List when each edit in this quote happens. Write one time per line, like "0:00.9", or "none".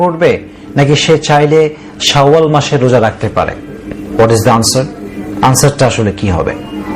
none